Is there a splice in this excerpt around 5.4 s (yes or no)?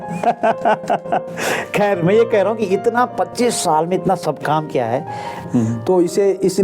yes